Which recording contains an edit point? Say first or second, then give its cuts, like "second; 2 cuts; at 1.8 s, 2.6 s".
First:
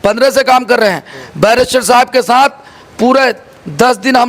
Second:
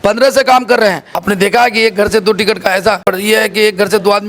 second; 2 cuts; at 1.2 s, 3.0 s